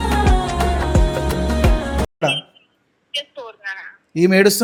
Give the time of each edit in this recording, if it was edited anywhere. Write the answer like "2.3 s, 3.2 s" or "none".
none